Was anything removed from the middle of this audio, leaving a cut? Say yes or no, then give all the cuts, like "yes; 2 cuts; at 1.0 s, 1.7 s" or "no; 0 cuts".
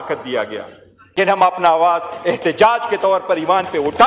yes; 1 cut; at 1.1 s